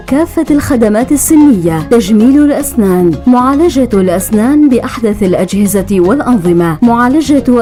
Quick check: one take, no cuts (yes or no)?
yes